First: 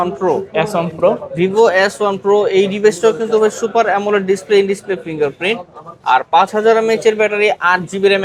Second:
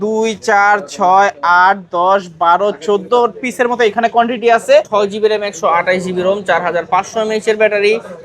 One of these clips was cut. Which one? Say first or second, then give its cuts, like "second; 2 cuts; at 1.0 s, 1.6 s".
second; 1 cut; at 4.9 s